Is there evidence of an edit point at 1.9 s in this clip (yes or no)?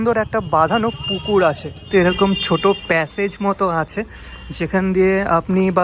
yes